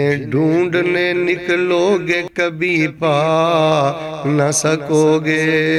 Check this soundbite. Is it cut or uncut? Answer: uncut